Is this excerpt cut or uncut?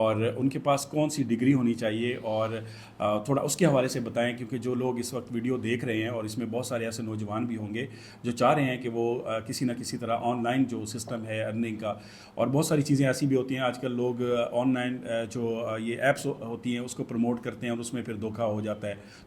uncut